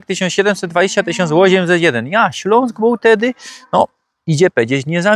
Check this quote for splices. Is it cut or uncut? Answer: uncut